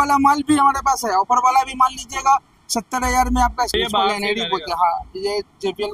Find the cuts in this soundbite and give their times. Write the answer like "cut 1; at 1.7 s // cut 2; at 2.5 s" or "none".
cut 1; at 3.7 s